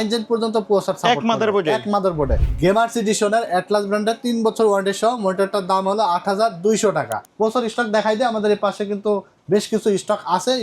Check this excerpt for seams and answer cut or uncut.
cut